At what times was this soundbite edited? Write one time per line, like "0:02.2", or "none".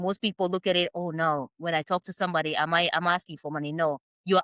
none